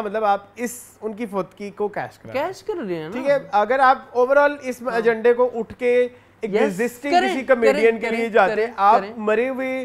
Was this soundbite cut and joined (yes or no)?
no